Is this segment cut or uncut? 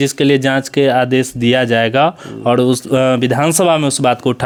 uncut